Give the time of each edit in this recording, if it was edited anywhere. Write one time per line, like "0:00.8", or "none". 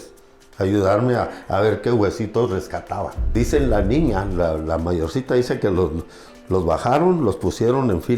0:03.2